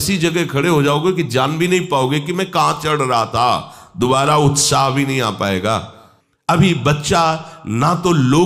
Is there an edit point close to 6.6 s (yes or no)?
yes